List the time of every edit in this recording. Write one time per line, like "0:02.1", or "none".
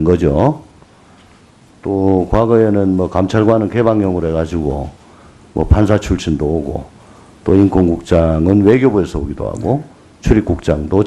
0:03.1

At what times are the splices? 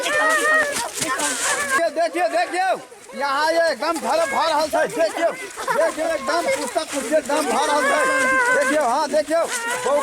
0:01.8

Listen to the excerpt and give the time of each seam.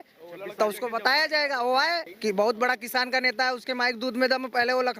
0:02.1

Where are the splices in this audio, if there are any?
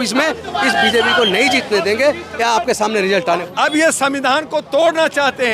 0:03.4

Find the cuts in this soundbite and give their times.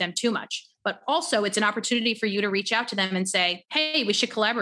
0:03.6

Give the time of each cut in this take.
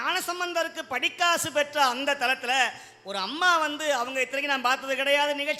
none

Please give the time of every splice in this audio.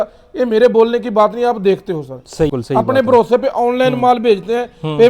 0:02.5

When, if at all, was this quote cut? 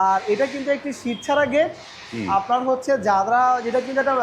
none

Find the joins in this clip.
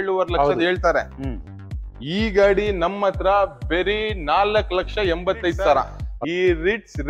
0:05.9

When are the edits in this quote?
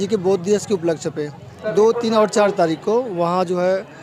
none

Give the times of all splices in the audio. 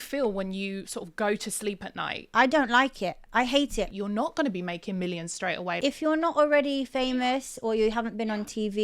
0:02.1
0:03.9
0:05.8

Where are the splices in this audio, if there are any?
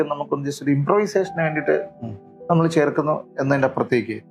none

